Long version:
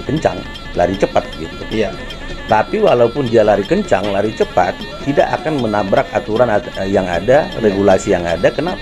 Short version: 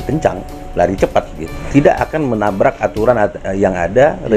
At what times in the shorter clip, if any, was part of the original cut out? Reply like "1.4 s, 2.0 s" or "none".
1.6 s